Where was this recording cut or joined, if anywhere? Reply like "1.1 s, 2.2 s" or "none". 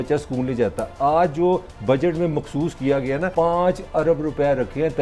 3.3 s